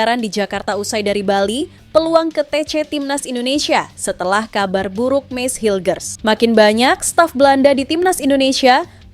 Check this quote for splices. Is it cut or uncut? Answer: cut